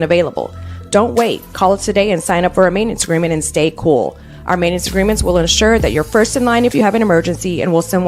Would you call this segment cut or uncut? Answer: uncut